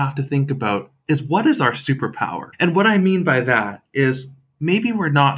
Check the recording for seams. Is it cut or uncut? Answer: cut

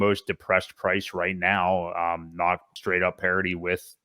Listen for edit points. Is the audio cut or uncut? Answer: cut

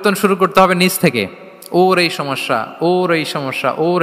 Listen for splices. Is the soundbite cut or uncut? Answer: uncut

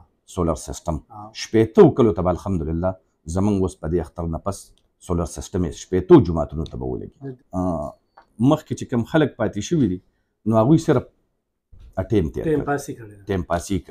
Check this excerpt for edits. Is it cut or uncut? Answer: cut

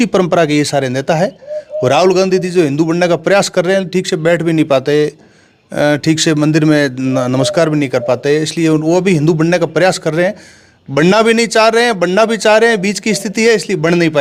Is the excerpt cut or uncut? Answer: uncut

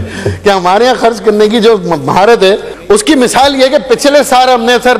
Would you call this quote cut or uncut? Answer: cut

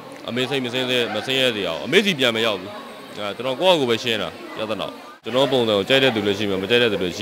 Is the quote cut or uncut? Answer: cut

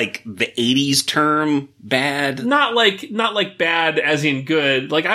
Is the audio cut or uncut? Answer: cut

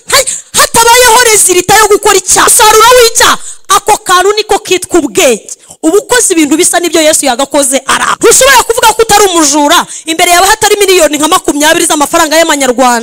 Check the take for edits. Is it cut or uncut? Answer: cut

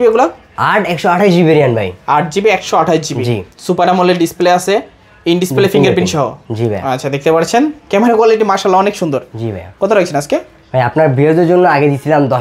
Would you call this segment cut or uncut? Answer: uncut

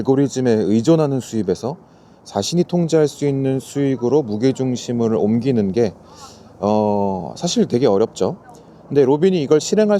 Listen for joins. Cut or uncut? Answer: uncut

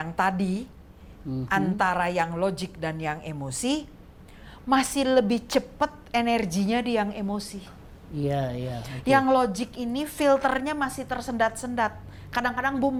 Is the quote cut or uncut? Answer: uncut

